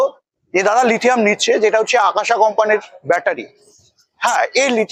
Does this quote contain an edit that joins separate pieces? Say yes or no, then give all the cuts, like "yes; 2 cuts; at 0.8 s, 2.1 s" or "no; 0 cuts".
no; 0 cuts